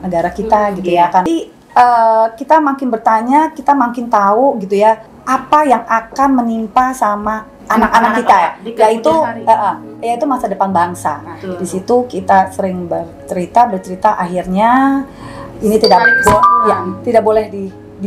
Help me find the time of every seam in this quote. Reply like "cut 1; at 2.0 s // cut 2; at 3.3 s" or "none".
cut 1; at 1.3 s // cut 2; at 5.1 s // cut 3; at 7.5 s

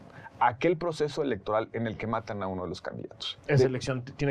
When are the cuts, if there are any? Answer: none

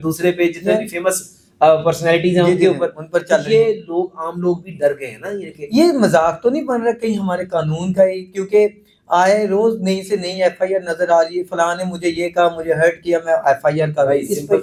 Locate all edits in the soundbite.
none

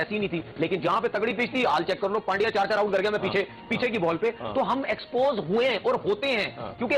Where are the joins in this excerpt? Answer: none

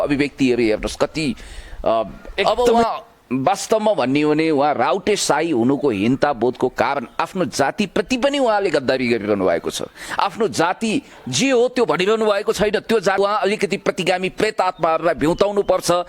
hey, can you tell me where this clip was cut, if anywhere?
cut 1; at 2.4 s // cut 2; at 13.2 s

